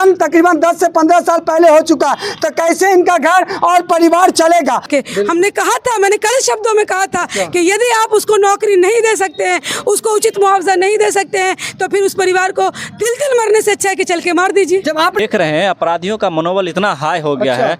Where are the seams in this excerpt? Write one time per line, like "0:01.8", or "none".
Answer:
0:04.9
0:15.2